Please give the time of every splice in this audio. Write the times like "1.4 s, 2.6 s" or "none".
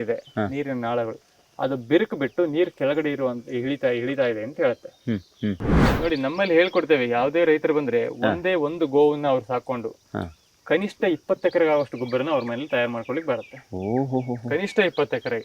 5.8 s